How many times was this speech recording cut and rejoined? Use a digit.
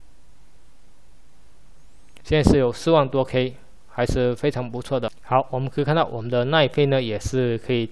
1